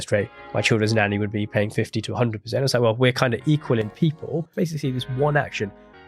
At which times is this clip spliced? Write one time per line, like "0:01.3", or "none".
0:04.5